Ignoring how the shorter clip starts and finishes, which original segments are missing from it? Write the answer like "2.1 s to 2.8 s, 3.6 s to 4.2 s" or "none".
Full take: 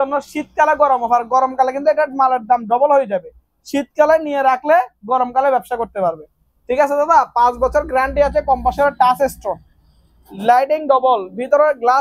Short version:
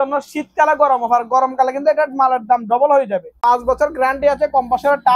3.4 s to 7.3 s